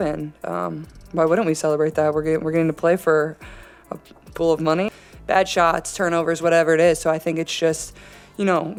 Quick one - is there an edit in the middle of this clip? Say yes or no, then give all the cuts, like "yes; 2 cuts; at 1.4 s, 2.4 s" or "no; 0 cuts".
no; 0 cuts